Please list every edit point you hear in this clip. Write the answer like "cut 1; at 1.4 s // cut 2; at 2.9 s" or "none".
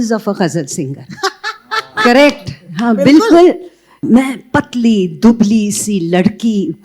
cut 1; at 4.0 s